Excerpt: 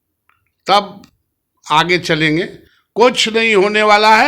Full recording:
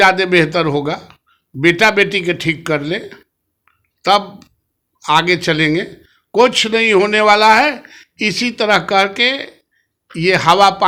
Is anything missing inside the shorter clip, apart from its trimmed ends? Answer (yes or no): no